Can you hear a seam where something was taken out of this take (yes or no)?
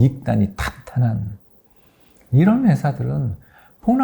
no